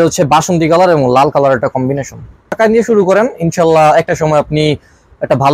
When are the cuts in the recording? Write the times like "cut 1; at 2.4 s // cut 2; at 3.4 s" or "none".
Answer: cut 1; at 2.6 s